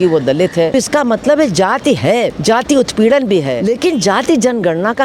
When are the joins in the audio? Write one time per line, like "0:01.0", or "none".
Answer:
0:00.7
0:02.3
0:03.6